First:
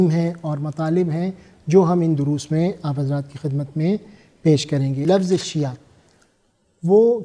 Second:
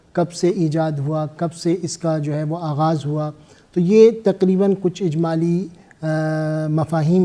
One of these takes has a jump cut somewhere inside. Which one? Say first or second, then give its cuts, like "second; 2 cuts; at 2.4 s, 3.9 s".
first; 1 cut; at 5.0 s